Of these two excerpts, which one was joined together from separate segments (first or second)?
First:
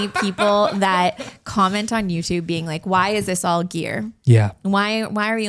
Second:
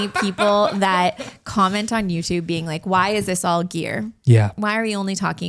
second